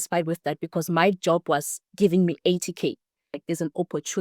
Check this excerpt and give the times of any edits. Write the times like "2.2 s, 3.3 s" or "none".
3.3 s